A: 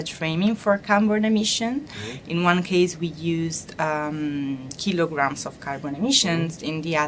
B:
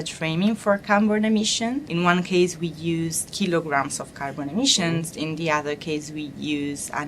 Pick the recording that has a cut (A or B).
B